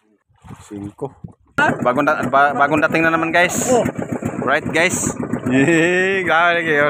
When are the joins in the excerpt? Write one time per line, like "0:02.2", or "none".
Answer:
0:01.6